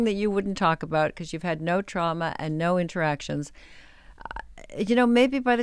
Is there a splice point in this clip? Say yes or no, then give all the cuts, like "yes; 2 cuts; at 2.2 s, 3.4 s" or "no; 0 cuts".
no; 0 cuts